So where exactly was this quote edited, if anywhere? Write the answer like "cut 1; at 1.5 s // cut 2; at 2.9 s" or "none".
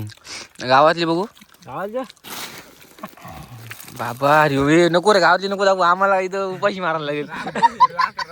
cut 1; at 7.4 s